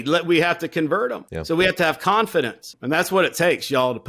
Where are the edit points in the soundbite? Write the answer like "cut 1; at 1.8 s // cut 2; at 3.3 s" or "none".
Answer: cut 1; at 1.3 s // cut 2; at 2.7 s